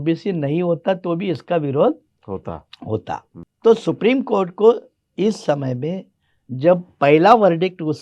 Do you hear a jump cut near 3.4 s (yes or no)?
yes